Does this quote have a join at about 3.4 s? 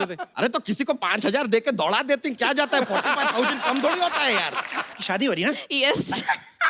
no; 1 cut; at 5.0 s

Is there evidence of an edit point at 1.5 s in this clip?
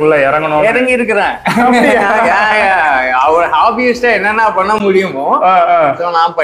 no; 0 cuts

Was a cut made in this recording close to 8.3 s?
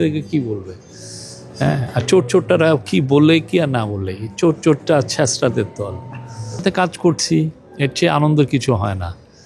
no; 1 cut; at 6.6 s

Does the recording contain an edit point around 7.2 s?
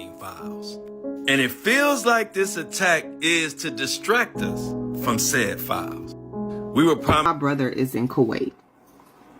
yes; 1 cut; at 7.2 s

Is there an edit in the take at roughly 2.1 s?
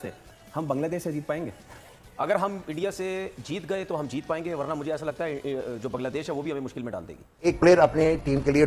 no; 1 cut; at 7.5 s

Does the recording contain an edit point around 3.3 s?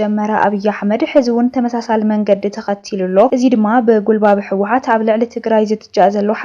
yes; 1 cut; at 3.3 s

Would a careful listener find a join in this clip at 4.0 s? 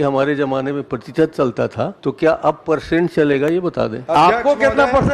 yes; 2 cuts; at 1.9 s, 4.0 s

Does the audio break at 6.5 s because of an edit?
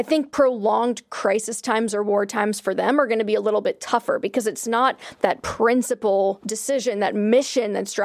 yes; 1 cut; at 6.5 s

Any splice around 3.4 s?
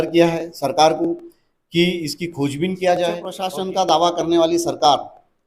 yes; 1 cut; at 3.4 s

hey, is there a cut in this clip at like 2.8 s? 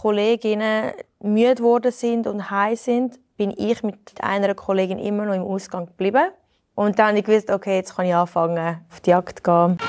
no; 2 cuts; at 4.2 s, 9.0 s

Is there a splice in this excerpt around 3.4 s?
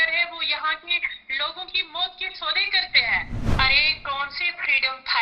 yes; 1 cut; at 3.4 s

